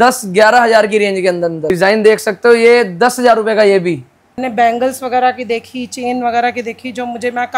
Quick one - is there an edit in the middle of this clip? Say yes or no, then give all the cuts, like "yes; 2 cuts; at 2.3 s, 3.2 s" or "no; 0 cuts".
yes; 2 cuts; at 1.6 s, 4.4 s